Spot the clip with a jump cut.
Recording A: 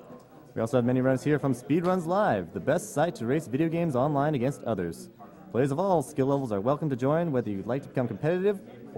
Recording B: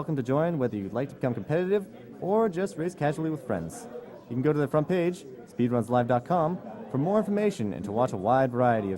B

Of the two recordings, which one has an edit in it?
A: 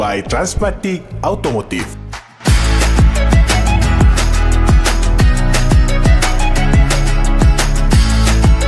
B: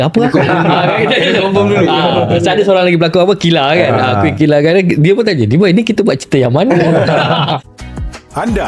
B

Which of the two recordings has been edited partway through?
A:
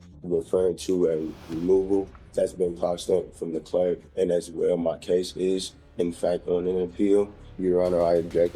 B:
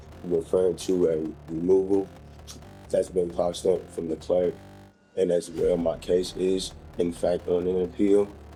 A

